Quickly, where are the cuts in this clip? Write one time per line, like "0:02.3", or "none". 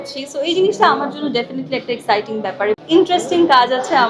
0:02.8